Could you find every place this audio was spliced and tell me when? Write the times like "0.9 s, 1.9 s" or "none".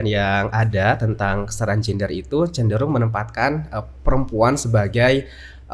none